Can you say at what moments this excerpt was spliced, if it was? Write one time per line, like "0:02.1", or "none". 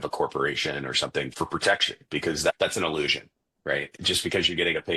0:01.3
0:02.5
0:03.9